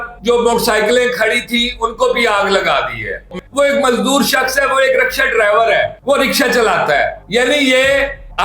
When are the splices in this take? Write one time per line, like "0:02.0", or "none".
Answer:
0:03.3